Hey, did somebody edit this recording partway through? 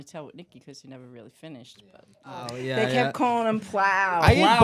yes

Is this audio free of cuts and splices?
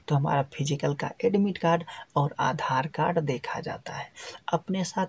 yes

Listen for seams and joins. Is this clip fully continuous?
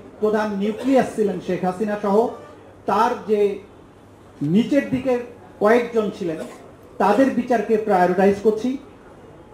yes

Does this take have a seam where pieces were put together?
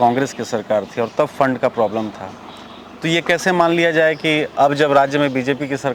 no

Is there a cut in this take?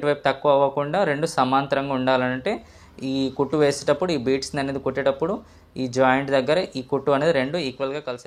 no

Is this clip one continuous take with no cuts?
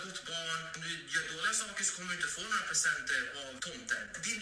yes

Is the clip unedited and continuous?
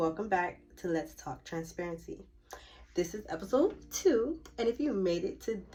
yes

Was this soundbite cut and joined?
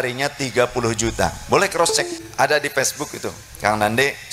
yes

